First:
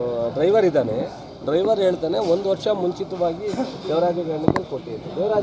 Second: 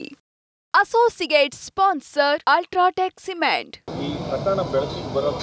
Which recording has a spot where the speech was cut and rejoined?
second; 1 cut; at 3.7 s

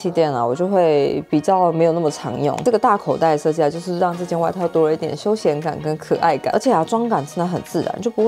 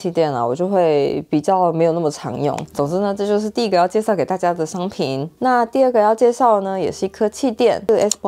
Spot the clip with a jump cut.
first; 2 cuts; at 2.6 s, 6.5 s

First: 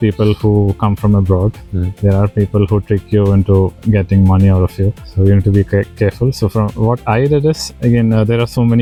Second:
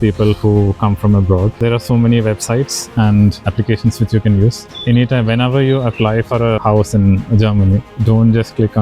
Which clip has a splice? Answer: second; 4 cuts; at 1.6 s, 3.4 s, 4.7 s, 6.6 s

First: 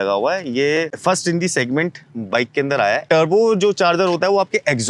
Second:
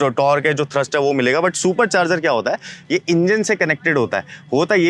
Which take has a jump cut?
first; 2 cuts; at 0.9 s, 3.0 s

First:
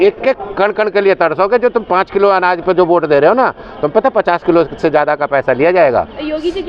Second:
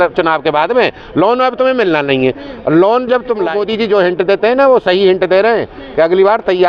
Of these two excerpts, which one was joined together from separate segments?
second; 1 cut; at 3.6 s

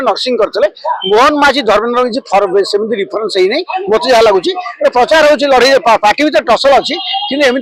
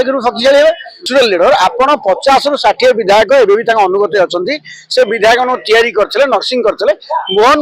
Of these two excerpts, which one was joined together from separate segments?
second; 1 cut; at 1.1 s

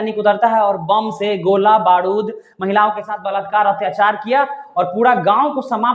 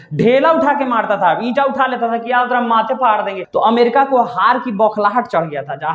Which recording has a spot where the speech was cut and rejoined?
second; 1 cut; at 3.4 s

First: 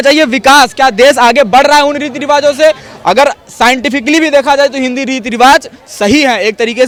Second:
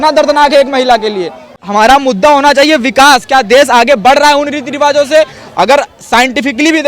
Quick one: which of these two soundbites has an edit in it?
second; 1 cut; at 1.5 s

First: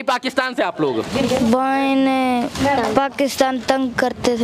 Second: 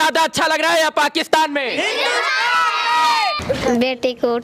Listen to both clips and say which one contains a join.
second; 1 cut; at 3.4 s

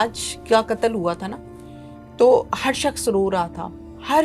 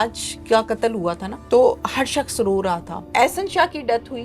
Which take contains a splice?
second; 2 cuts; at 1.3 s, 3.0 s

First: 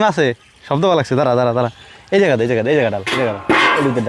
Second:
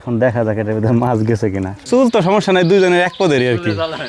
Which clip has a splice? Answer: second; 1 cut; at 1.7 s

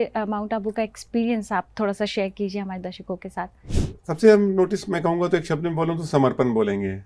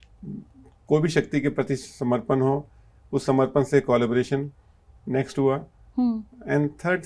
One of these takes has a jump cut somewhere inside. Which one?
first; 1 cut; at 3.6 s

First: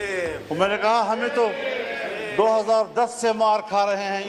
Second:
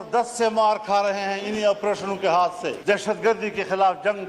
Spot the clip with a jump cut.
second; 1 cut; at 2.8 s

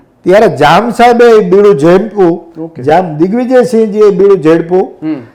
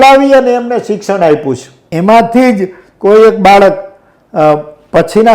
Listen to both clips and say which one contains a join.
second; 1 cut; at 1.8 s

